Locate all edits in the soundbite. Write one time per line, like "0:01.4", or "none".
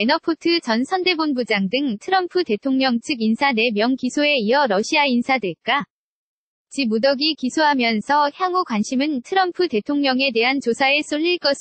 none